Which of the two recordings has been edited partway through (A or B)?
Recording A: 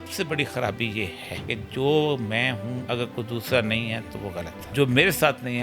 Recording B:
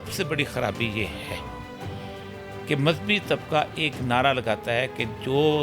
A